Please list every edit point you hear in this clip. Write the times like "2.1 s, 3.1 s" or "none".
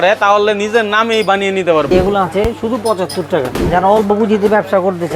1.9 s, 3.6 s